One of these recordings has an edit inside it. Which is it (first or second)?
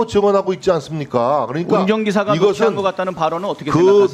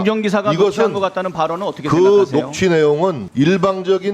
second